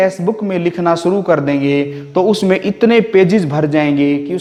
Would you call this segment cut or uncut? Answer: uncut